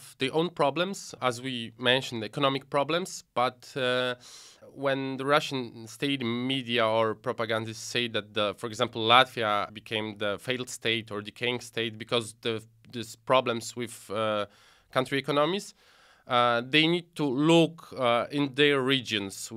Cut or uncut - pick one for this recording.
cut